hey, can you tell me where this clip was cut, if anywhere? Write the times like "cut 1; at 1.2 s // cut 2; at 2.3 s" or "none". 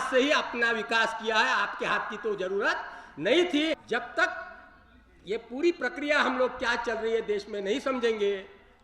cut 1; at 3.8 s